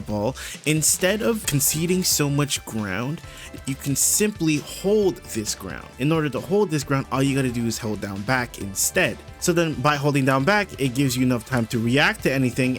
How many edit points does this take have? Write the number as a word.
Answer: four